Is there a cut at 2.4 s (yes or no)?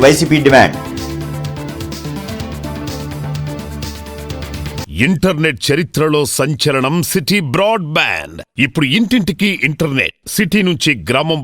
no